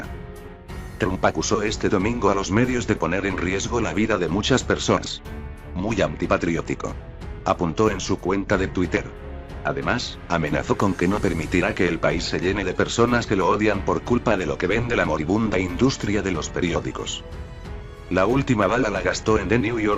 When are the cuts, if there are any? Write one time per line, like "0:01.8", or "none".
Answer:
0:16.9